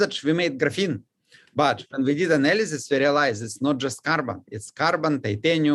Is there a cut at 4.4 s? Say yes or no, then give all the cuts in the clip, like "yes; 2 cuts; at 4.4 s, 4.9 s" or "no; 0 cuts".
no; 1 cut; at 1.2 s